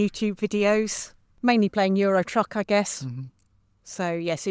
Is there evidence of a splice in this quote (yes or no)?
no